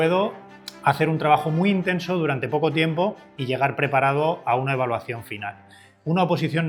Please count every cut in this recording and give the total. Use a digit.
0